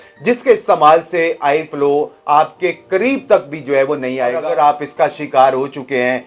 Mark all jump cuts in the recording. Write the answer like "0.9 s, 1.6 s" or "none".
4.4 s